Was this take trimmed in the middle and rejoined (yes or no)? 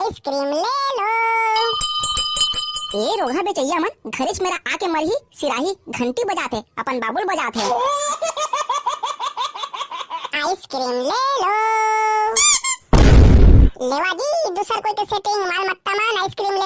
yes